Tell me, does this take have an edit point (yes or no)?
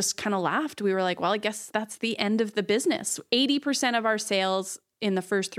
no